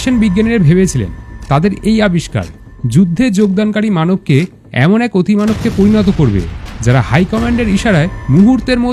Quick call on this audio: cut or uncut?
uncut